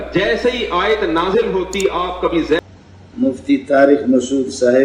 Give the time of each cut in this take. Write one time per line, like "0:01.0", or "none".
0:02.6